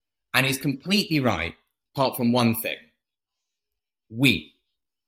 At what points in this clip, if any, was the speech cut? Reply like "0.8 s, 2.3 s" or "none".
3.7 s